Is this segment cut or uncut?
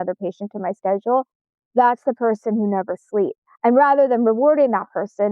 cut